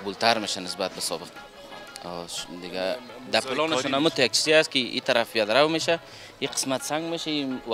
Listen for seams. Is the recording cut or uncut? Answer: uncut